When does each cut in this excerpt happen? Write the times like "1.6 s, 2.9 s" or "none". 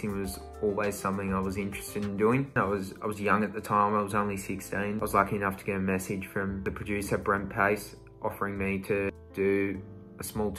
none